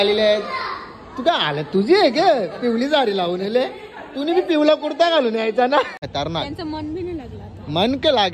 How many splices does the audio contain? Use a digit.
1